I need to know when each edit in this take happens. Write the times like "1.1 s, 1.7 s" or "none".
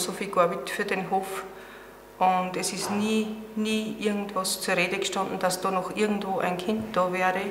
none